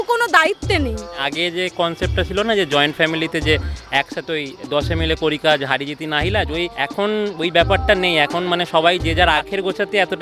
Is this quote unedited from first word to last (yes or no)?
yes